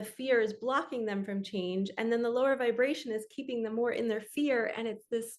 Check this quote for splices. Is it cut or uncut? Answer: uncut